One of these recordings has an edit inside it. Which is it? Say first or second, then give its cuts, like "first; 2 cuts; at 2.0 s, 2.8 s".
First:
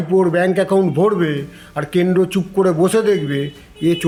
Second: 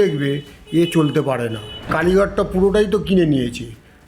second; 1 cut; at 1.9 s